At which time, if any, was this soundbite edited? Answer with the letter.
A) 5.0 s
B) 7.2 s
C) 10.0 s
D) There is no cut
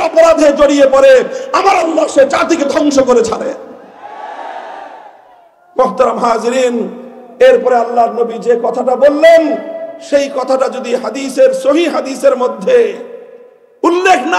D